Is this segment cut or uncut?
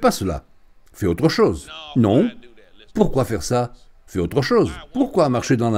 cut